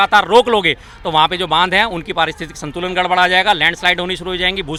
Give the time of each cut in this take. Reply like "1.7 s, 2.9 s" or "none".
none